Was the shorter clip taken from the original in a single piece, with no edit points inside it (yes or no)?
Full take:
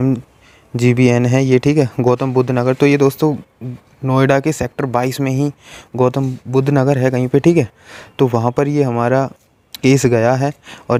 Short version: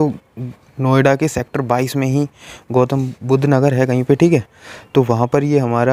yes